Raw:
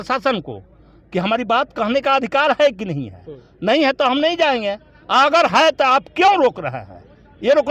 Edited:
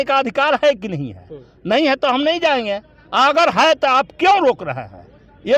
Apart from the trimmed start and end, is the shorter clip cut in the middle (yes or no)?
no